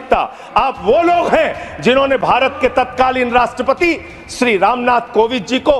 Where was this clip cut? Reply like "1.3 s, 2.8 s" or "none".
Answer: none